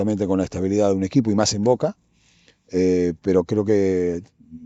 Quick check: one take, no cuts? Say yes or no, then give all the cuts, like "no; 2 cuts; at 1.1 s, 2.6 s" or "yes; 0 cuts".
yes; 0 cuts